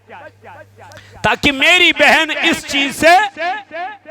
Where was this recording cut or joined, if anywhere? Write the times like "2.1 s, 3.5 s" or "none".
0.9 s

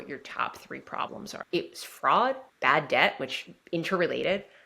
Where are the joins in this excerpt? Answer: 1.4 s, 2.5 s

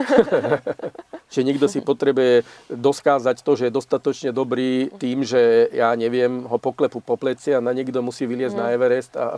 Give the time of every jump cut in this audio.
1.2 s, 5.0 s

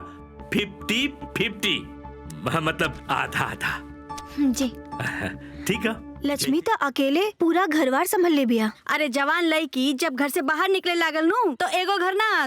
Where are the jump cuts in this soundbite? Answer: 6.1 s

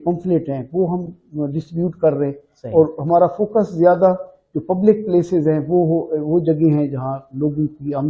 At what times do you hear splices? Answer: none

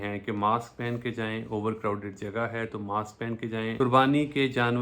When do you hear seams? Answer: 3.7 s

